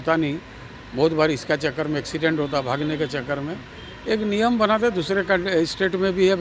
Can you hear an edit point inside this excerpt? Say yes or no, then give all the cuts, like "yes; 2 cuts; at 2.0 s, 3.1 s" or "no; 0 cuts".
no; 0 cuts